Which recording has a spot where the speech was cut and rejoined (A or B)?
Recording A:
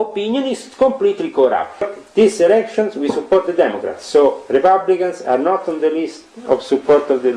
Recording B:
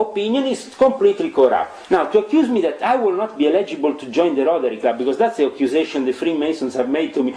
A